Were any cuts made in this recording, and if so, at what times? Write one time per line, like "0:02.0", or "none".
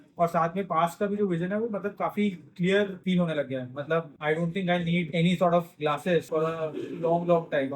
0:03.0
0:04.1
0:05.1
0:06.3